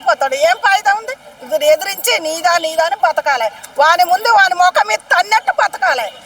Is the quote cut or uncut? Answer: uncut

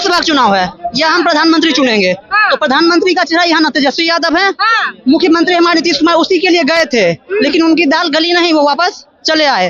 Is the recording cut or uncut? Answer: uncut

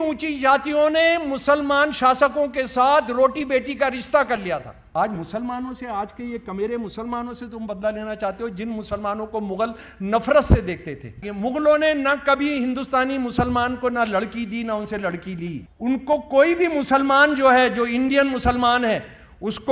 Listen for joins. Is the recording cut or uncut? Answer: cut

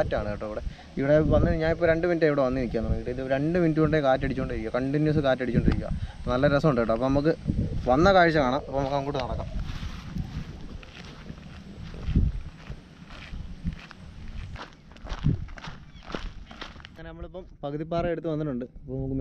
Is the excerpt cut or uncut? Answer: uncut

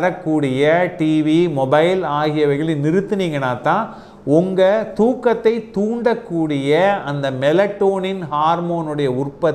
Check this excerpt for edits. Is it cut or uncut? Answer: uncut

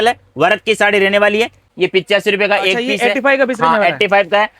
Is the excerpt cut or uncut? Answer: cut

